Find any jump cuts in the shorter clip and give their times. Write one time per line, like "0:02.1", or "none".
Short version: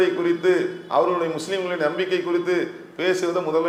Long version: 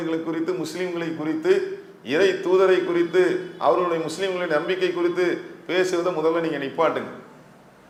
none